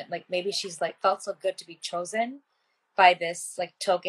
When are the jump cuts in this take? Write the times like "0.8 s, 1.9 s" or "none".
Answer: none